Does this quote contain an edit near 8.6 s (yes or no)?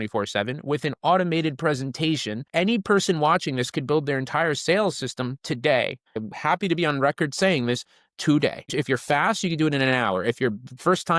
yes